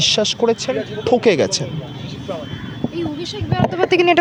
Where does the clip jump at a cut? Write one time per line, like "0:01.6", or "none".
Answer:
none